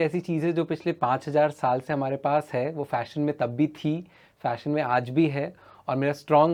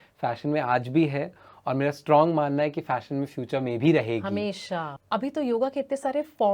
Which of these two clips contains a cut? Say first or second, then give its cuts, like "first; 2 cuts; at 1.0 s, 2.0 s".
second; 1 cut; at 4.9 s